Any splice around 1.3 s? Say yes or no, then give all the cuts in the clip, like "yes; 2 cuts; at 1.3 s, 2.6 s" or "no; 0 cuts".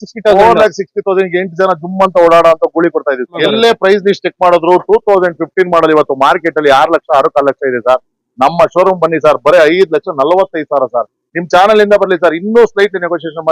no; 1 cut; at 3.4 s